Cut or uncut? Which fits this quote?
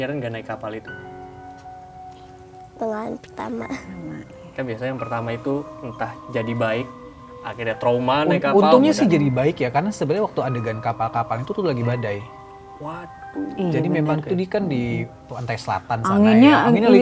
uncut